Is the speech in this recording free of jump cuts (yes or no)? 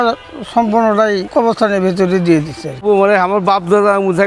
no